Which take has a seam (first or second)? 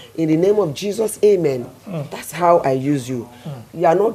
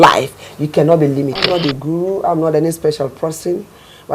second